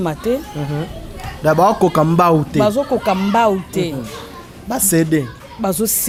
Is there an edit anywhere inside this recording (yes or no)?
no